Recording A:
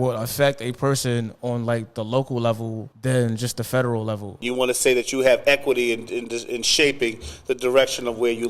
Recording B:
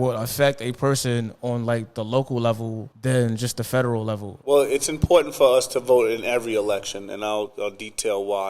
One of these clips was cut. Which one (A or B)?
A